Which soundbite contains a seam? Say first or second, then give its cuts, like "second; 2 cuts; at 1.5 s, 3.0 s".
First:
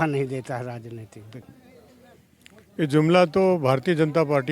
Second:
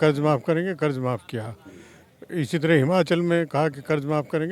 first; 1 cut; at 1.4 s